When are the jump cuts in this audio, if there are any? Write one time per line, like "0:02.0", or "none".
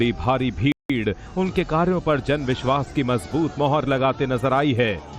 none

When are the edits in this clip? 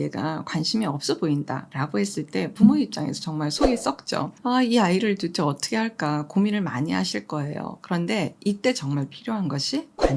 0:01.7
0:04.3

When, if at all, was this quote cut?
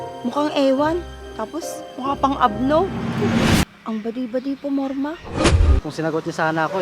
0:03.6
0:05.8

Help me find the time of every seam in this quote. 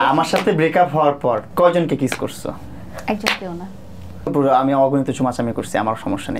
0:01.5
0:04.3

